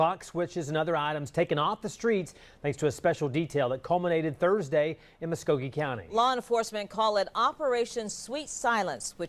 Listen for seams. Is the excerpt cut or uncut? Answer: uncut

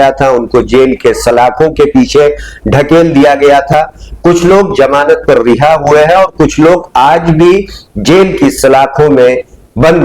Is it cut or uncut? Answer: uncut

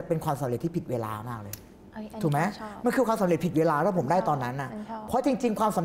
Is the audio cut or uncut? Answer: uncut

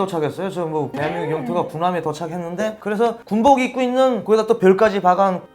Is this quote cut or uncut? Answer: cut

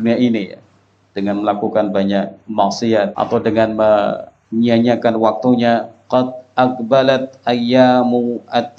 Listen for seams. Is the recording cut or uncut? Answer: cut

